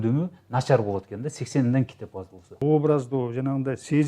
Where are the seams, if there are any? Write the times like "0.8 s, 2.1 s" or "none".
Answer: 2.6 s